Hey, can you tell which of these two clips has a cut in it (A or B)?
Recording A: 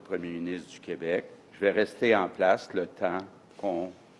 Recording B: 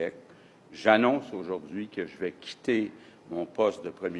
A